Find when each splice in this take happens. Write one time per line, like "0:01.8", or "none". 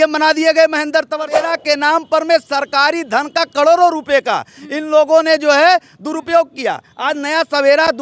0:01.3